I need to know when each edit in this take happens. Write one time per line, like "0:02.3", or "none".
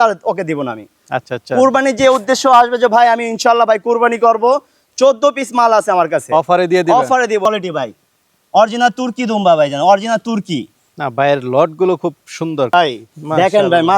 0:07.4
0:12.7

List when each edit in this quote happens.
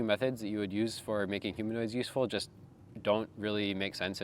none

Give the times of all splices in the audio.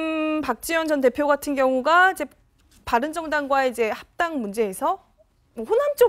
0:05.2

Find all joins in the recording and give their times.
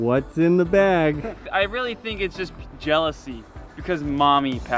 0:01.4

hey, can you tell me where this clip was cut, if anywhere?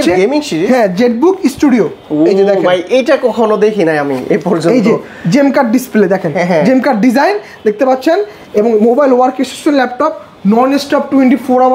none

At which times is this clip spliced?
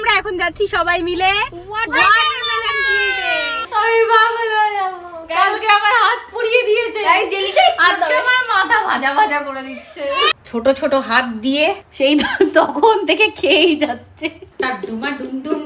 0:03.6
0:10.3
0:11.9
0:14.4

